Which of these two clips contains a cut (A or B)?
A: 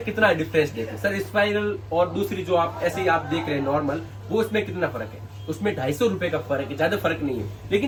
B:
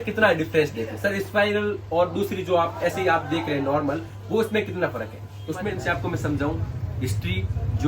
B